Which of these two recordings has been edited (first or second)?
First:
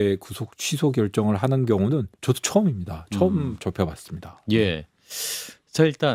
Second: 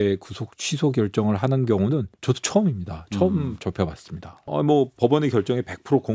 second